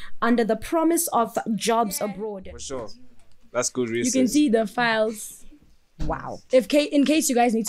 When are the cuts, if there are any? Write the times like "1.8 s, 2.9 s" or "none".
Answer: 2.3 s